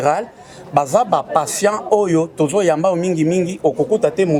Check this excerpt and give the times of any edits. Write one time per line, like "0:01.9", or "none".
none

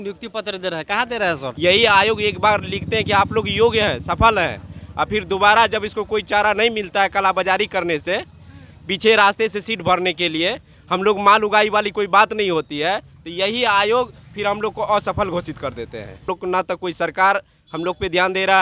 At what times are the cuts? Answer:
0:01.5
0:16.2

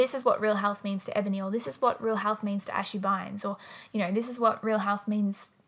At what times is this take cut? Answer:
none

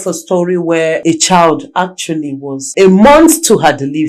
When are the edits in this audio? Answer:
0:01.0
0:02.6

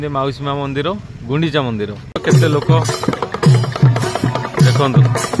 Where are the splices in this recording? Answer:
0:02.2

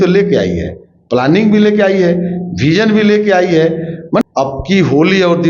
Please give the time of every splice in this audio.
0:04.2

